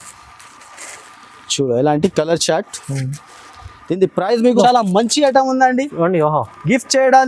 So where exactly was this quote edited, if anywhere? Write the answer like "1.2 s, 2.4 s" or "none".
4.6 s